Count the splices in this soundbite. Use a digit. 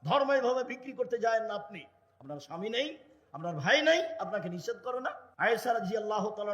1